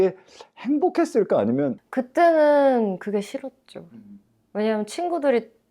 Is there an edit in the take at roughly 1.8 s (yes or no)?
yes